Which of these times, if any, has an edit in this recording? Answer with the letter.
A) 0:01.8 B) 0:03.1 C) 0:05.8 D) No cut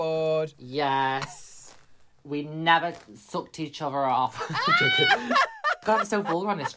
C